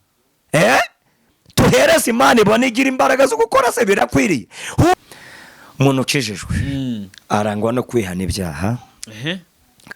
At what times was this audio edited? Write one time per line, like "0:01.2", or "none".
0:05.0